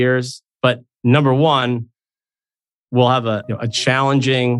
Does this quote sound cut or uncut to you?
uncut